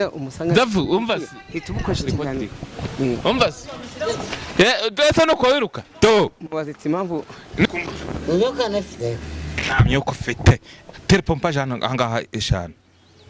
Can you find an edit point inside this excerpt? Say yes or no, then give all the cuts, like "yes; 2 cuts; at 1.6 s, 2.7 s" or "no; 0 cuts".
yes; 1 cut; at 7.7 s